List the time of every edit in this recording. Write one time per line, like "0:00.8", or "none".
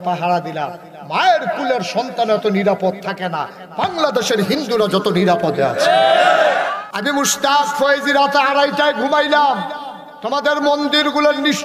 0:06.7